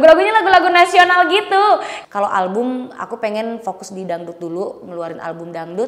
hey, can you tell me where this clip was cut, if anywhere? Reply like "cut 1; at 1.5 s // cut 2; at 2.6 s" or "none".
cut 1; at 1.9 s